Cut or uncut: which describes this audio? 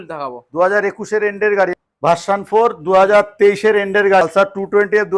cut